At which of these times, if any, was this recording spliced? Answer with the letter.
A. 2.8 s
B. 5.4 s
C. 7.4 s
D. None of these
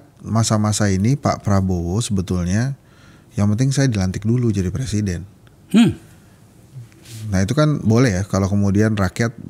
D